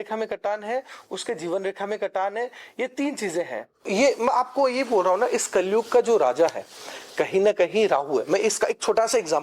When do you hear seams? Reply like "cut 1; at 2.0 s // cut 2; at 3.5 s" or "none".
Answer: cut 1; at 3.9 s